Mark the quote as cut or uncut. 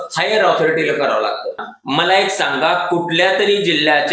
cut